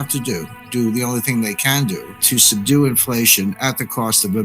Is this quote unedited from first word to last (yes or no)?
no